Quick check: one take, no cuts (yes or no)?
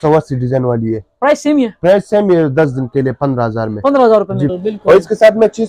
no